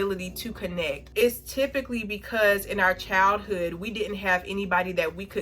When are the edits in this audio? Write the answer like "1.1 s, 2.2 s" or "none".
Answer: 1.0 s